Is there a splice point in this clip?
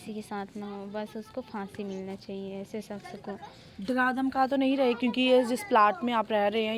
no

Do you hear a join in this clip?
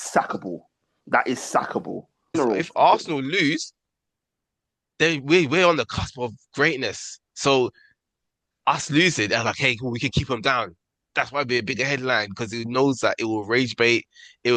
yes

